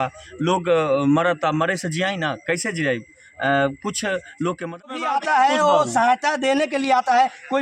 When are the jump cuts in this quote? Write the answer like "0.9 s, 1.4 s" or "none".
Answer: 5.0 s